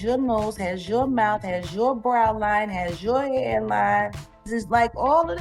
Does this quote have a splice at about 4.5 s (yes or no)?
yes